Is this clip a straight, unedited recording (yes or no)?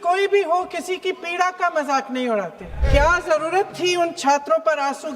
no